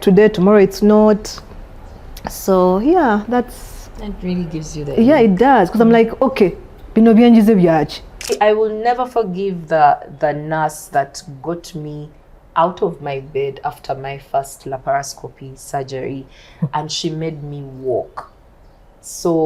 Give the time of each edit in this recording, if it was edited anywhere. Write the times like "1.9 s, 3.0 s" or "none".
8.2 s